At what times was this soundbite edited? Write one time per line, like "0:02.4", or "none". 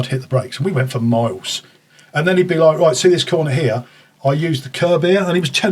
none